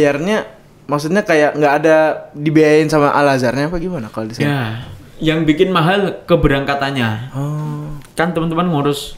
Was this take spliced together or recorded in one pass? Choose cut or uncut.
cut